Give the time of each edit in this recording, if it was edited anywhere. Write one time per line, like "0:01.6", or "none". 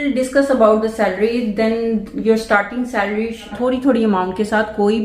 0:03.5